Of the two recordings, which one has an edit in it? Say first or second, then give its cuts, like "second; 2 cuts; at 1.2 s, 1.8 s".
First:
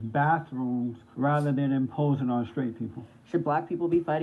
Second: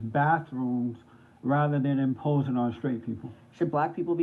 first; 1 cut; at 1.0 s